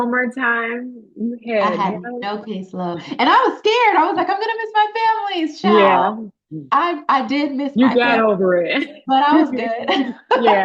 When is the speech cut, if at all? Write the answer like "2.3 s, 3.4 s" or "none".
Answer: none